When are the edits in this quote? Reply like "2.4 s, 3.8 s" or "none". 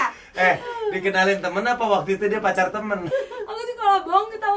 3.1 s